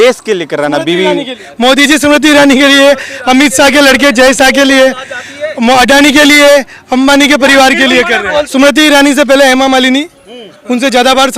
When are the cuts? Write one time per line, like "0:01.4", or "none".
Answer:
0:01.4
0:08.5